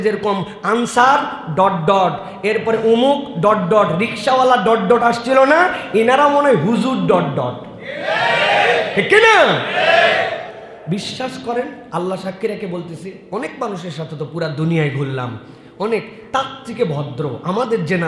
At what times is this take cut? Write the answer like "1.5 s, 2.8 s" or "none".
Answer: 10.4 s